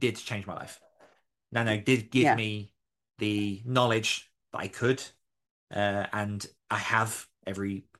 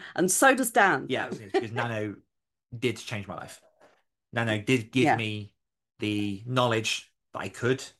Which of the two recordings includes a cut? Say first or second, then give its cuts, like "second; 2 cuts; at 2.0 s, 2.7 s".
second; 1 cut; at 1.7 s